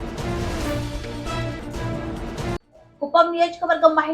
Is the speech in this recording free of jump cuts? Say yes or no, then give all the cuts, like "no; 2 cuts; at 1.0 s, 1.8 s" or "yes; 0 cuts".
no; 1 cut; at 2.7 s